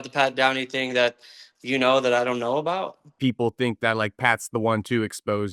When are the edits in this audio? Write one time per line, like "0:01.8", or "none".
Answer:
0:03.1